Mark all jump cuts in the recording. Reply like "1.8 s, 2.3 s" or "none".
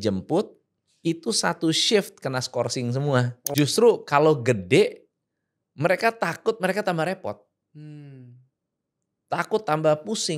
3.5 s